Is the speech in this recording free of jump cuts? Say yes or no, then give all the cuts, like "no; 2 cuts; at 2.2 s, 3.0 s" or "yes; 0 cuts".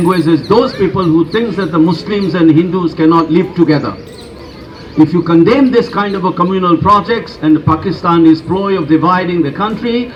yes; 0 cuts